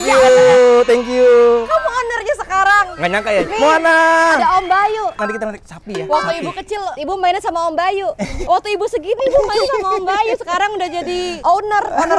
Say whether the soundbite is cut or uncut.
cut